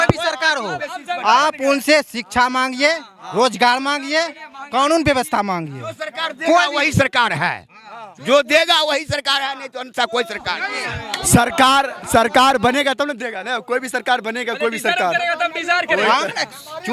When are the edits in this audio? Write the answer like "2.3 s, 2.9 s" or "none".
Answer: none